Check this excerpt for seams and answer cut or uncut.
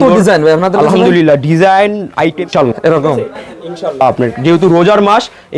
cut